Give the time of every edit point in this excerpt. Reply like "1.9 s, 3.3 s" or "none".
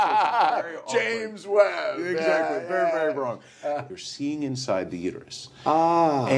3.9 s